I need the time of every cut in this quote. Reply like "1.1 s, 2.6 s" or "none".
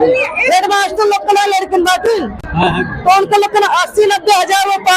none